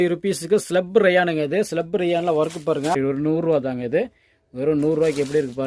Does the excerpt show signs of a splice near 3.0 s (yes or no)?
yes